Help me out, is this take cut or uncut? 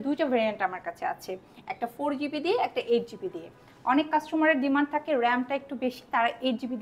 uncut